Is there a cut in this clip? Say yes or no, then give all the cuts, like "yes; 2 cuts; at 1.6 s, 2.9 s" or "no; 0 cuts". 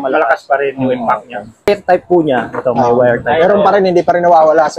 yes; 1 cut; at 1.7 s